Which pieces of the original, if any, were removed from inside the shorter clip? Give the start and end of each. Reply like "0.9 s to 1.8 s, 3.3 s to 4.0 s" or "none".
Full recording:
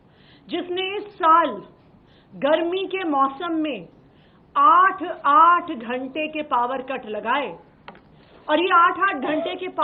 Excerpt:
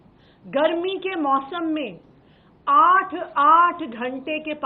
none